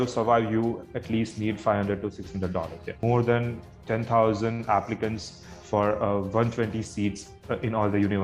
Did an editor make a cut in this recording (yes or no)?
yes